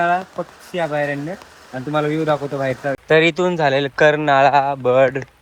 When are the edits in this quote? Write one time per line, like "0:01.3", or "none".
0:02.8